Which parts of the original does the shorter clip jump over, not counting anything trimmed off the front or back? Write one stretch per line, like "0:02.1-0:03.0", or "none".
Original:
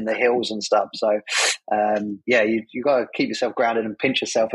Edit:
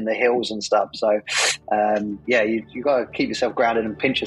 none